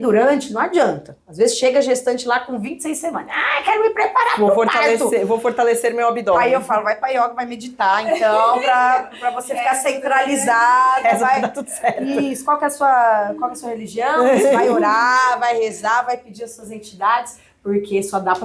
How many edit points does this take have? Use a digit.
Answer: 0